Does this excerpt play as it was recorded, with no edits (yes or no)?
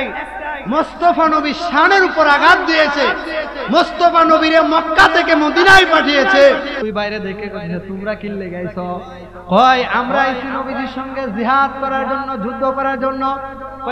no